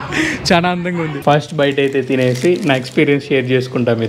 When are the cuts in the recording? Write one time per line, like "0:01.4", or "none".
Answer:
0:01.1